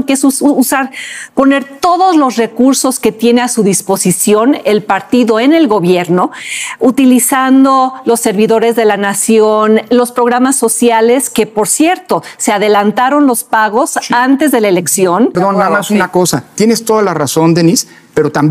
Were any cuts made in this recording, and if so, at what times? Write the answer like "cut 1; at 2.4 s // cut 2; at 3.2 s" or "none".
cut 1; at 15.3 s